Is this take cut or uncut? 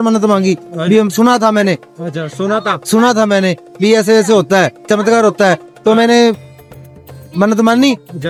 uncut